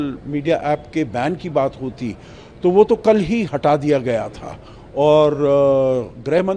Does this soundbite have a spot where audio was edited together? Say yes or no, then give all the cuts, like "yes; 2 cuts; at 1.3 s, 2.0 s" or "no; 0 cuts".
no; 0 cuts